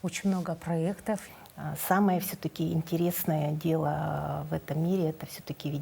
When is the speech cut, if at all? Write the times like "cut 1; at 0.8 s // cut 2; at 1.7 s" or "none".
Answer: cut 1; at 1.3 s

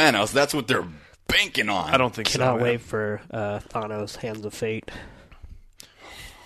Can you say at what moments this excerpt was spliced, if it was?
none

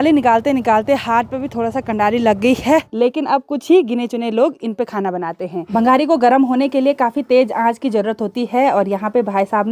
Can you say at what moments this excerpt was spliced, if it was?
cut 1; at 2.9 s // cut 2; at 5.7 s

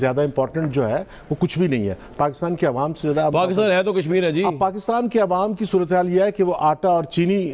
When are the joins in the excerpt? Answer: none

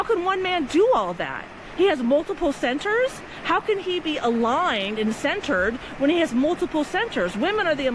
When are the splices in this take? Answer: none

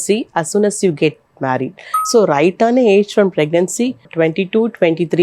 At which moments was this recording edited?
cut 1; at 1.9 s // cut 2; at 4.0 s

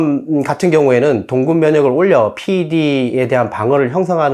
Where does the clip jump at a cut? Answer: none

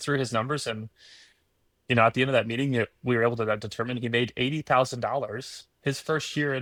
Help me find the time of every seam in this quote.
none

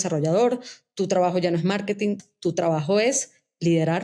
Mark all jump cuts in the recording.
cut 1; at 2.2 s

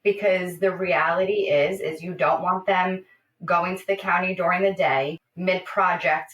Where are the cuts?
cut 1; at 5.3 s

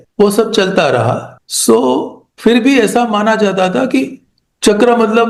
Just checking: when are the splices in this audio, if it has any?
none

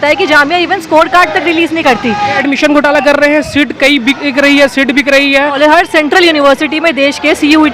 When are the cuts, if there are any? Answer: cut 1; at 2.4 s // cut 2; at 5.5 s

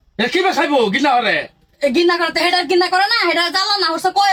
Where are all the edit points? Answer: none

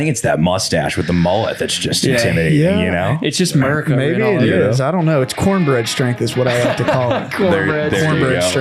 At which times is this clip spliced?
none

